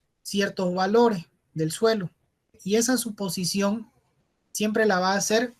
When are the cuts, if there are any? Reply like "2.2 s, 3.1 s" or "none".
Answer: 2.6 s